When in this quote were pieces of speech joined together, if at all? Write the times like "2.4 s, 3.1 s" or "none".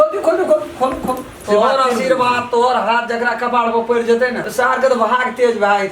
1.3 s, 4.4 s

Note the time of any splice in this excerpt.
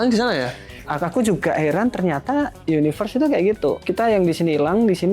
0.8 s, 3.8 s

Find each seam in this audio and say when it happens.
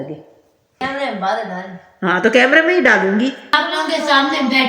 0.8 s, 3.5 s

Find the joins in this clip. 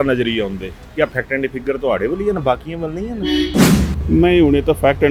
none

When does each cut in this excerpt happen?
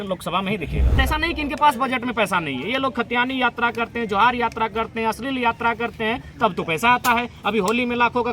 1.0 s

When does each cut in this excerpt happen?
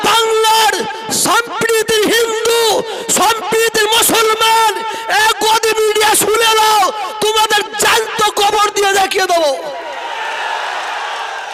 none

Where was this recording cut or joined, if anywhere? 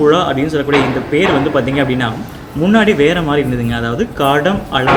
none

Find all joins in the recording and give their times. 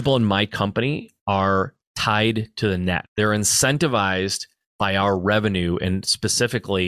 1.1 s, 3.1 s

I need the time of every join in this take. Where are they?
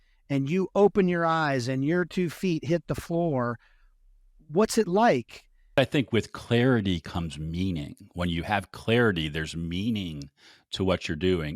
5.7 s

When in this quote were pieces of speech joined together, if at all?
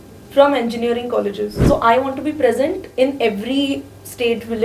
1.6 s

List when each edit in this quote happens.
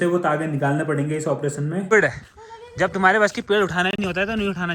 1.9 s

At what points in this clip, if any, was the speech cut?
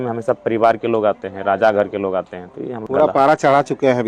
2.8 s

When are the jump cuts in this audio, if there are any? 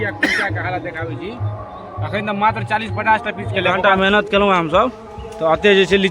3.3 s

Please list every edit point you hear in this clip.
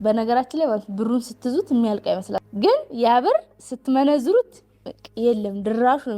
2.4 s

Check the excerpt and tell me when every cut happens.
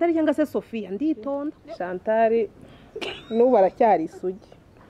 1.5 s

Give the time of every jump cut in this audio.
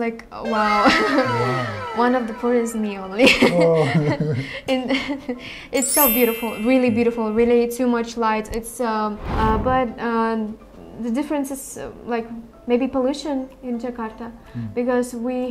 9.2 s

